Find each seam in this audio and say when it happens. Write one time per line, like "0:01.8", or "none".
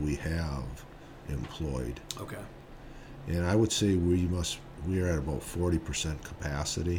0:02.6